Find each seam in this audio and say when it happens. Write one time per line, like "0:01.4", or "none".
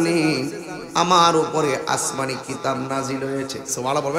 none